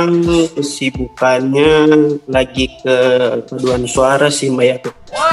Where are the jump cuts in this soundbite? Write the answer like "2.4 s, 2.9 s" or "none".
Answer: 2.2 s, 3.9 s

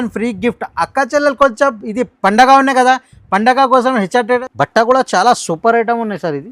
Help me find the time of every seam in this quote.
4.4 s

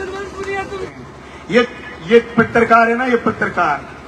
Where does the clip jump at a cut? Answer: 0.9 s

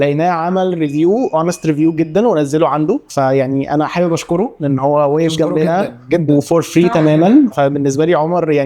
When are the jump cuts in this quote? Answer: 3.1 s

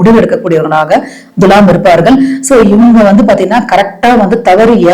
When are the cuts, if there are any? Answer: none

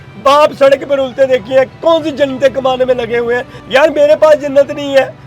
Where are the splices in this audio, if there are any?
3.5 s

